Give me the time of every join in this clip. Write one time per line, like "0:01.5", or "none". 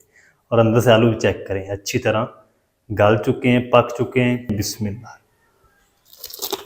0:04.5